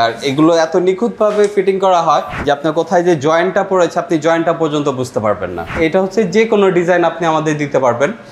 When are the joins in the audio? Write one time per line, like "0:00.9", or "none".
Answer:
0:02.3
0:05.8

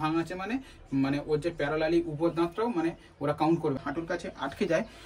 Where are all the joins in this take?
0:03.8

